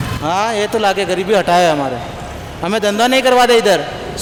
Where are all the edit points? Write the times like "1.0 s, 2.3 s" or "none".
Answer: none